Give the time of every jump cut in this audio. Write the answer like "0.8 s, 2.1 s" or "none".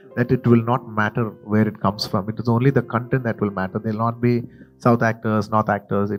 none